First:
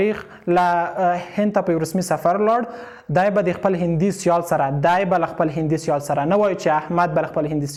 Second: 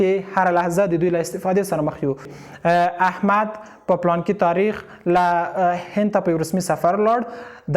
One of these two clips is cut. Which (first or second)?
second